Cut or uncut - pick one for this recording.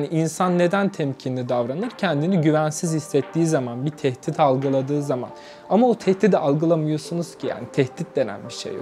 uncut